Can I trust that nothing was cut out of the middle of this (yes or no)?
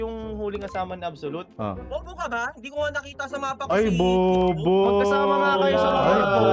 no